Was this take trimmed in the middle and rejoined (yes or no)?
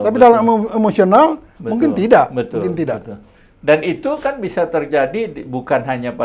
no